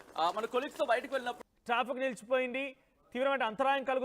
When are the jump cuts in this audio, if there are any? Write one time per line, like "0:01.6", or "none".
0:01.3